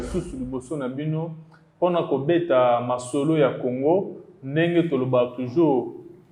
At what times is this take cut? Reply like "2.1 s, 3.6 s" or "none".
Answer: none